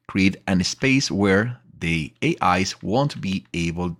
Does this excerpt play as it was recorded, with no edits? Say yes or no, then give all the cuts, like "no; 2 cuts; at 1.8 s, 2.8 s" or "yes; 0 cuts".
yes; 0 cuts